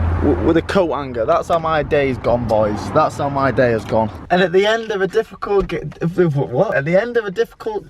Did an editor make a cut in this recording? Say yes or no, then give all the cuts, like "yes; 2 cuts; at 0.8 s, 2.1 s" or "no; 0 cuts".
yes; 2 cuts; at 4.2 s, 6.7 s